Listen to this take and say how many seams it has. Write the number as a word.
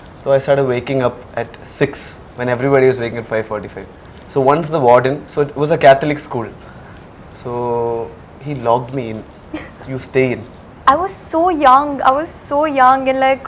one